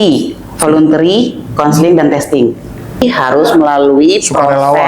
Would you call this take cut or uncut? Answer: cut